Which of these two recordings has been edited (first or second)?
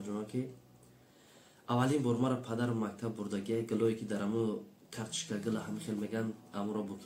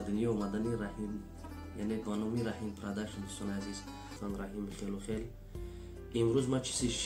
second